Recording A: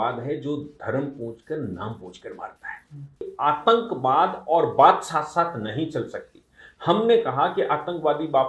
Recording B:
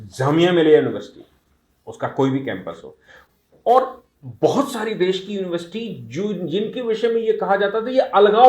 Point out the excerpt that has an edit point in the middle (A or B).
A